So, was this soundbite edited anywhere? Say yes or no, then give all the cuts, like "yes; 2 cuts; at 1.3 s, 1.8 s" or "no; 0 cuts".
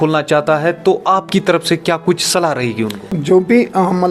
yes; 1 cut; at 3.1 s